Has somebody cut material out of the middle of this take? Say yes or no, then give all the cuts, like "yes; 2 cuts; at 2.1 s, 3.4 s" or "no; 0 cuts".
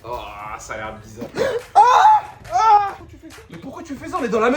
yes; 1 cut; at 1.3 s